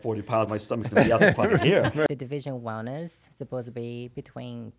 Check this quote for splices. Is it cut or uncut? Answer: cut